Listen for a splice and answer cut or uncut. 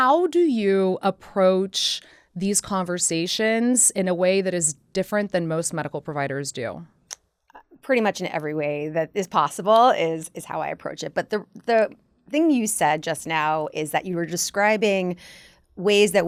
uncut